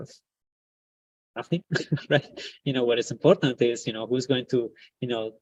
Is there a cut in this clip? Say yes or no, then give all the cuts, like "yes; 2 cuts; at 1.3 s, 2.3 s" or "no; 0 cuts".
no; 0 cuts